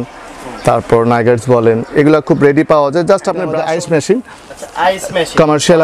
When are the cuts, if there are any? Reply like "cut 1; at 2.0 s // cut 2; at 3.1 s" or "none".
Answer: cut 1; at 3.5 s